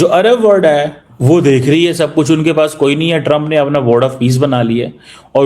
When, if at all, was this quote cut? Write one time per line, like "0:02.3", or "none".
0:01.1